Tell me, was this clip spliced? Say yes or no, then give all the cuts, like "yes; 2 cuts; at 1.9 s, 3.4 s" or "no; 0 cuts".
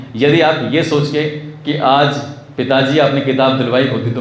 no; 0 cuts